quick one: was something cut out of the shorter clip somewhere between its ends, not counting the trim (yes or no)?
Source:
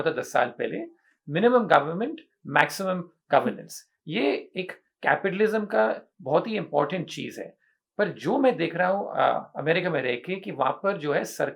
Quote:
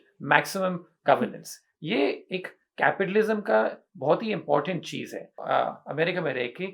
yes